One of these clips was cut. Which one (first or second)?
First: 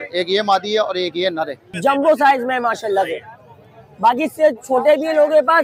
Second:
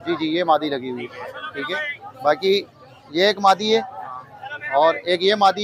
first